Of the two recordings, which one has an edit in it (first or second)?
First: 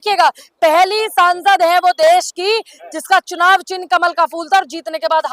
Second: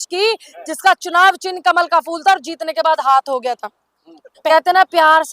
second